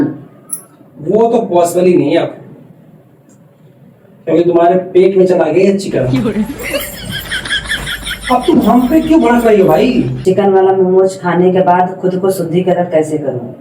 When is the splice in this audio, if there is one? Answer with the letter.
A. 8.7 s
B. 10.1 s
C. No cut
B